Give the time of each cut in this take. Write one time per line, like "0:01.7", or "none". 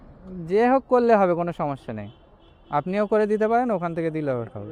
none

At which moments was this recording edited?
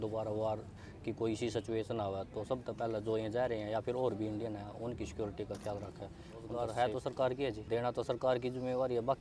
0:06.5
0:07.6

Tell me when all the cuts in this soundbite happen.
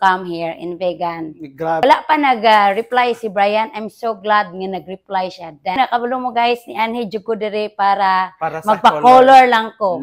0:01.8
0:05.8

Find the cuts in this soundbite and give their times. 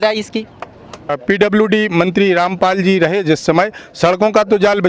0:01.1

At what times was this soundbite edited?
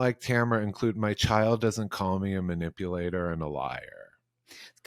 none

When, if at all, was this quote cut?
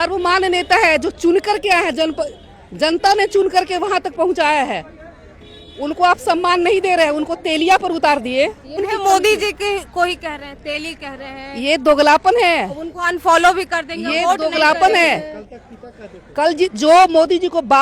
0:08.8

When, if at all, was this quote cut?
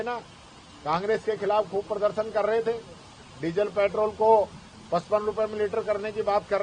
none

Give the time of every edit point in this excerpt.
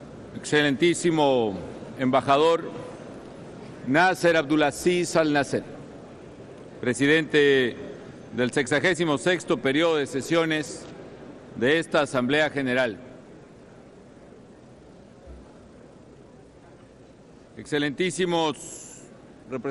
0:01.1

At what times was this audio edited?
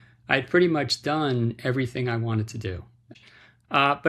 0:03.0

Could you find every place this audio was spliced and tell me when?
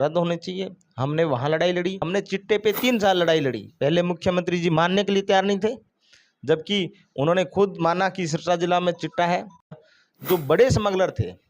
0:02.1
0:09.8

